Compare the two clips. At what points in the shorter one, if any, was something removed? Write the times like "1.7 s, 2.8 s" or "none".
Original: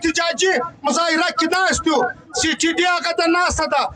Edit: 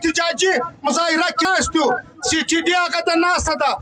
1.5 s